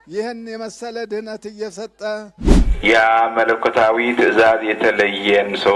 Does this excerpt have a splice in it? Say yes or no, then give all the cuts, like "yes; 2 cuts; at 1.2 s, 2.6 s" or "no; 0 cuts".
yes; 1 cut; at 2.6 s